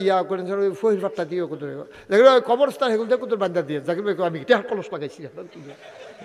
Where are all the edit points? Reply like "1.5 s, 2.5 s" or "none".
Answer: none